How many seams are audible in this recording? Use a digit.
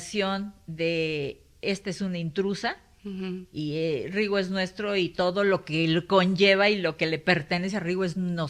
0